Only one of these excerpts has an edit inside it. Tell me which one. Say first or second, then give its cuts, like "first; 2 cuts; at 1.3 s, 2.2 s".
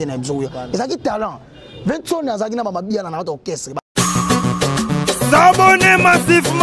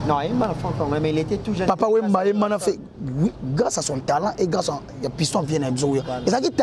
first; 1 cut; at 3.7 s